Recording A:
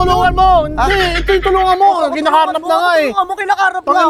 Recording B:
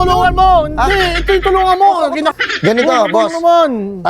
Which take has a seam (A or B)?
B